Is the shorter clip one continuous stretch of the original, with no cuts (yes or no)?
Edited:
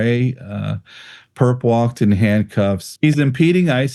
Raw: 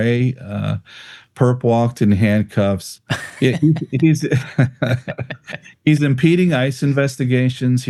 no